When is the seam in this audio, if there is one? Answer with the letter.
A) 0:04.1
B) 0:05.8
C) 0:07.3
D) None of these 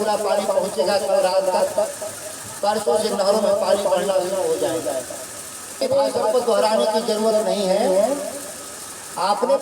B